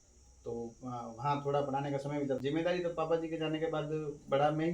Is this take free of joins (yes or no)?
no